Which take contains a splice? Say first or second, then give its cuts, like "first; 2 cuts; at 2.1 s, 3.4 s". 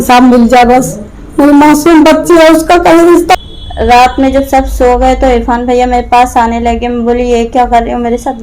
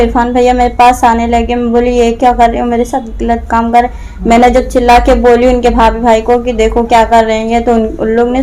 first; 1 cut; at 3.3 s